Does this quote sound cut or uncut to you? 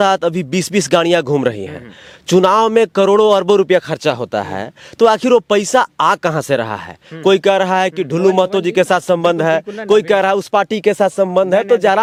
uncut